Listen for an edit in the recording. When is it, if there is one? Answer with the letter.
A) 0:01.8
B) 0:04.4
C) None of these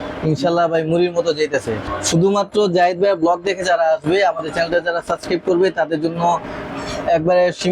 A